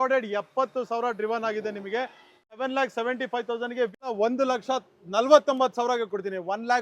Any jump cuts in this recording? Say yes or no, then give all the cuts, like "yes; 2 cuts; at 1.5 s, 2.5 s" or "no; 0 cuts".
yes; 2 cuts; at 2.5 s, 4.1 s